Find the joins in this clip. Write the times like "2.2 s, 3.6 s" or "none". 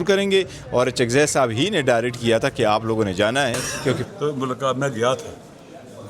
4.0 s

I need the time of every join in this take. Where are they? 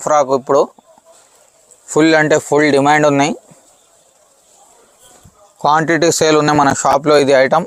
none

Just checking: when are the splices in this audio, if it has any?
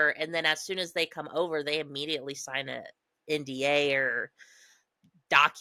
none

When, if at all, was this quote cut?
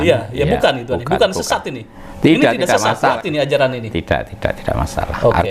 3.2 s

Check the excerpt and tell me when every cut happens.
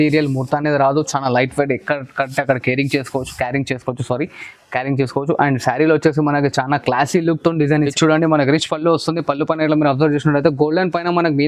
7.9 s

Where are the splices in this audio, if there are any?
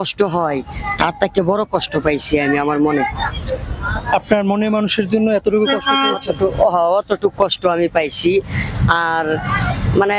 none

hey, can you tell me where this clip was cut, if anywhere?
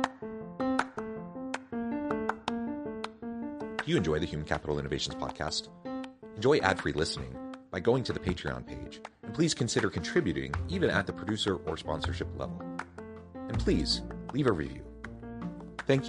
none

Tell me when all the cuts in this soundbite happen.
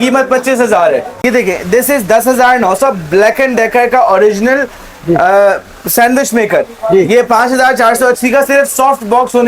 1.2 s

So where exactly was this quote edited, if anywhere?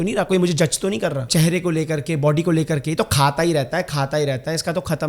1.2 s

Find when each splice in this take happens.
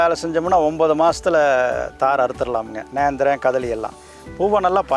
none

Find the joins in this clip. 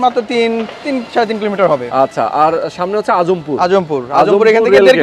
none

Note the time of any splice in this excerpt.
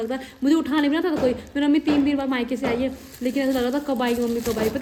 none

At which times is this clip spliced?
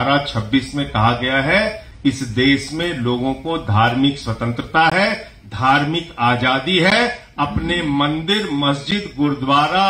none

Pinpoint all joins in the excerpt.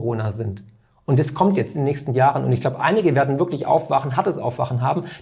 none

